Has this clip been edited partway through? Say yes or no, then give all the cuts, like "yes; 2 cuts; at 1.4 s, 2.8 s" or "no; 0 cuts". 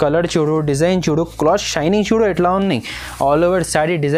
no; 0 cuts